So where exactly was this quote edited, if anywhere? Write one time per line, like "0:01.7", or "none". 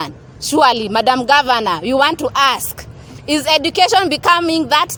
none